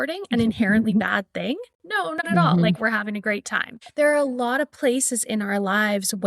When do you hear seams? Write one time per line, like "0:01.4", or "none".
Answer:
0:03.8